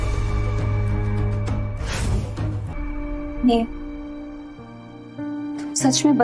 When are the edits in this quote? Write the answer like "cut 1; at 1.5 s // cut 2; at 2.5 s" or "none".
cut 1; at 2.7 s